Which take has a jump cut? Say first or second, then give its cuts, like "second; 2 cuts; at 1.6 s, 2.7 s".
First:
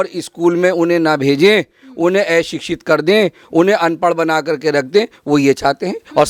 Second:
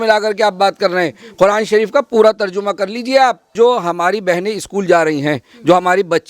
second; 1 cut; at 3.5 s